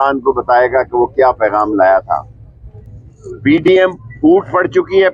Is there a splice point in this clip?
no; 0 cuts

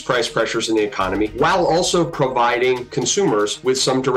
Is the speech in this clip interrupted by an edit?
yes; 2 cuts; at 1.3 s, 3.3 s

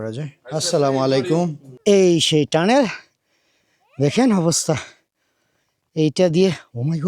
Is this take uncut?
no; 1 cut; at 1.8 s

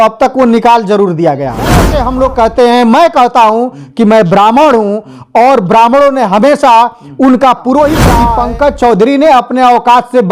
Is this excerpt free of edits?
no; 2 cuts; at 2.0 s, 8.3 s

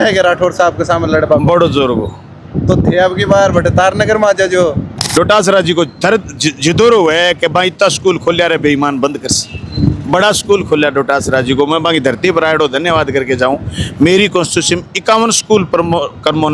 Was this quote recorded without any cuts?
no; 1 cut; at 4.9 s

